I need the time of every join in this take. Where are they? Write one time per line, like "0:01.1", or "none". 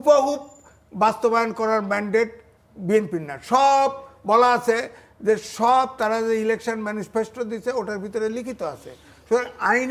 none